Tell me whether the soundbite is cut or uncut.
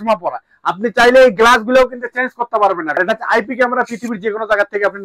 cut